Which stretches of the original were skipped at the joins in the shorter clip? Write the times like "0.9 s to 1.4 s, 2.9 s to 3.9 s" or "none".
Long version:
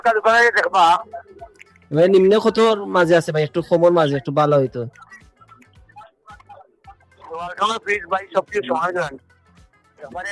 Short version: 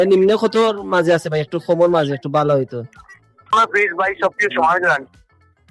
5.6 s to 7.6 s

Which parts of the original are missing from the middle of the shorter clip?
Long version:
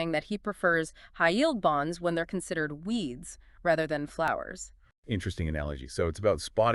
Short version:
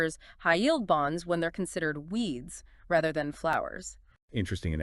none

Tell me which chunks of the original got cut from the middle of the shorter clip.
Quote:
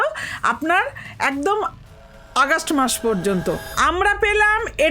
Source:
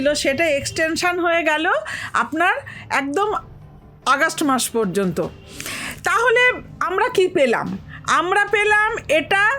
5.4 s to 8.0 s

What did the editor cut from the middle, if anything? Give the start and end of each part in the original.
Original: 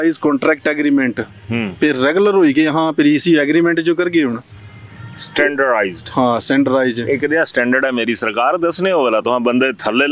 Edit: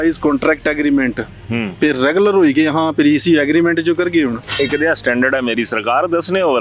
4.5 s to 7.0 s

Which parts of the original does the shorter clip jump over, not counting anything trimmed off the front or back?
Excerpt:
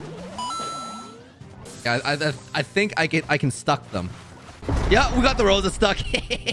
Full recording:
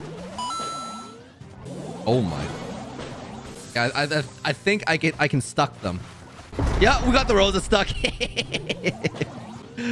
1.6 s to 3.5 s

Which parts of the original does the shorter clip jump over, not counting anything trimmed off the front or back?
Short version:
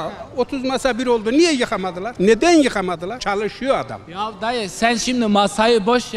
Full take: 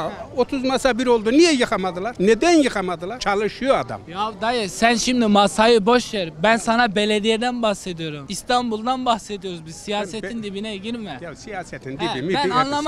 none

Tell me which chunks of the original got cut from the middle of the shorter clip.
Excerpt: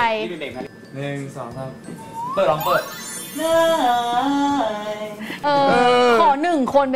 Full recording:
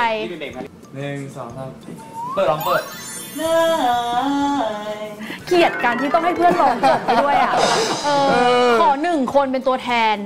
5.4 s to 8.0 s

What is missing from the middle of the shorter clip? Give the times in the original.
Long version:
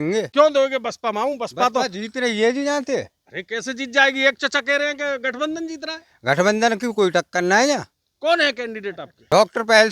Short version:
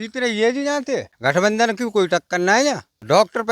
3.1 s to 6.1 s, 7.5 s to 8.7 s

